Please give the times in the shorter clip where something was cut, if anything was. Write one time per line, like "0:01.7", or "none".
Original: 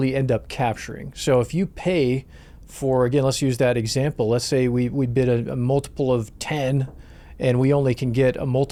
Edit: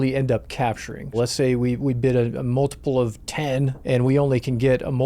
0:01.1
0:03.8